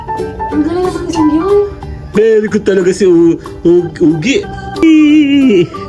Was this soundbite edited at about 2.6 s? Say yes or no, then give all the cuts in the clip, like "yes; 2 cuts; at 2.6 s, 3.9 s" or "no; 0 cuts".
no; 1 cut; at 4.8 s